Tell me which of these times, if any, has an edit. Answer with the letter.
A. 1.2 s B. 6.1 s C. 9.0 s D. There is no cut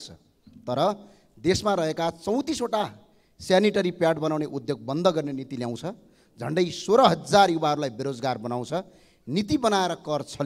D